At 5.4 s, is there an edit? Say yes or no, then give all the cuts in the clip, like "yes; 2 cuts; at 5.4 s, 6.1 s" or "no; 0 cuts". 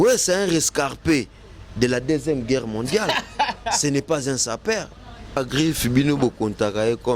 yes; 1 cut; at 5.4 s